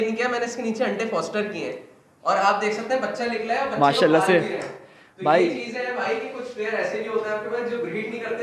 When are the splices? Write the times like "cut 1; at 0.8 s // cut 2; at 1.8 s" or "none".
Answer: none